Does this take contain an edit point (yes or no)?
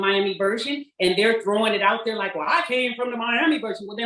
no